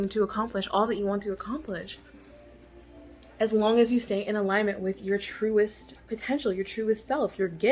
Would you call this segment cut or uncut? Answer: uncut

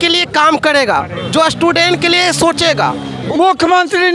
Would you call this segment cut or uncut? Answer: cut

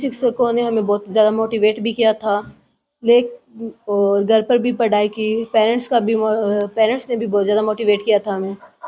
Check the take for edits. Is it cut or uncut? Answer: uncut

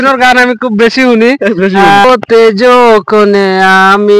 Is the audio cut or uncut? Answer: cut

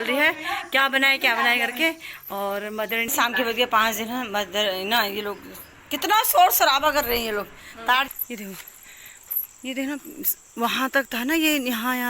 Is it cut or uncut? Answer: cut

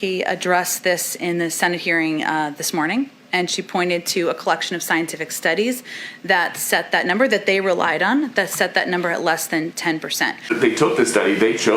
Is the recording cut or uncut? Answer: cut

